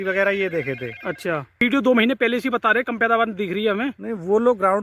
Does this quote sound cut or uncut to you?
cut